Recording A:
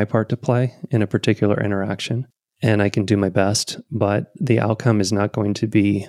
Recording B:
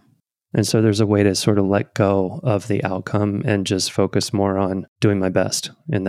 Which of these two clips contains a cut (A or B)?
B